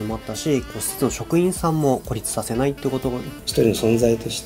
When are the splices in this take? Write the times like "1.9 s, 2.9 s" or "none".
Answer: 3.5 s